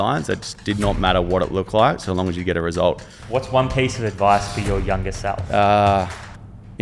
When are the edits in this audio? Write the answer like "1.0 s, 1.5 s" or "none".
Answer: 3.1 s, 5.4 s